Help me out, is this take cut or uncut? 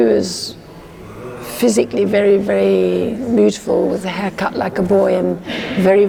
uncut